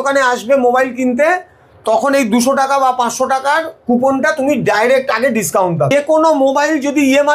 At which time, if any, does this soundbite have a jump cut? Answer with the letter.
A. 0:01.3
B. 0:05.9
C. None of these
B